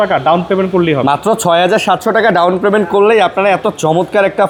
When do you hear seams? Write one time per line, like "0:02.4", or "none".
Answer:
none